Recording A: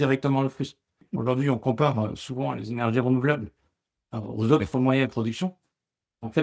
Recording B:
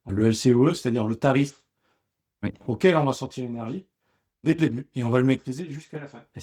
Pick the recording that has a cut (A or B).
A